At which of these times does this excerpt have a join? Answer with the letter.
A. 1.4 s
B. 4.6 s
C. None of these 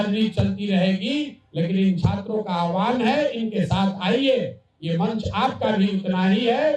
C